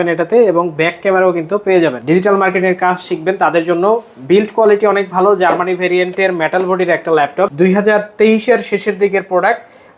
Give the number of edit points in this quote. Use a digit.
2